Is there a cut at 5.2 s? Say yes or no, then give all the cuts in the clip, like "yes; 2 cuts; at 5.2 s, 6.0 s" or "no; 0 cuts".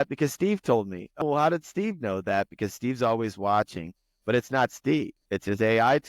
yes; 2 cuts; at 1.2 s, 5.2 s